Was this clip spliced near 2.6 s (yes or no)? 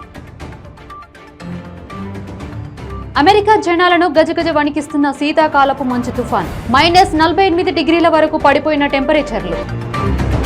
yes